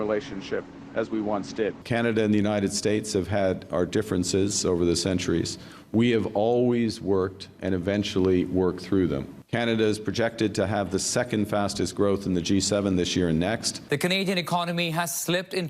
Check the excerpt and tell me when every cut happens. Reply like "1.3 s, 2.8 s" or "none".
1.8 s, 9.4 s, 13.7 s